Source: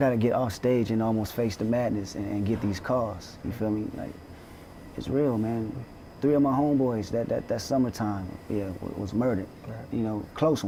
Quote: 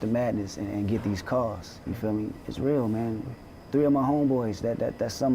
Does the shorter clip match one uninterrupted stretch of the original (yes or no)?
no